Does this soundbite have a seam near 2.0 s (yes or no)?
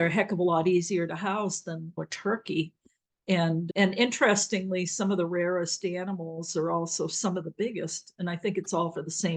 yes